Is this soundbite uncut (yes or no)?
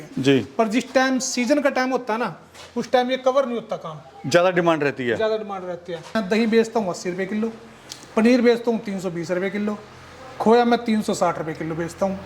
no